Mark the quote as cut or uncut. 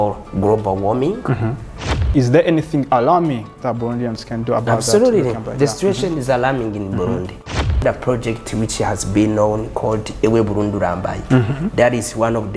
cut